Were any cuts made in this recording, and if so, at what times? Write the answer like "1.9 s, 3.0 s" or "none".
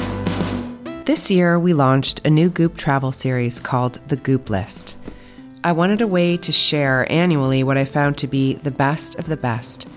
1.0 s